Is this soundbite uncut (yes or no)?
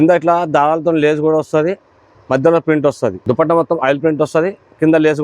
no